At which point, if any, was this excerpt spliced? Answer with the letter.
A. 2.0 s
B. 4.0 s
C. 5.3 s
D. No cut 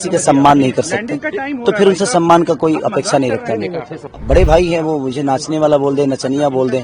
B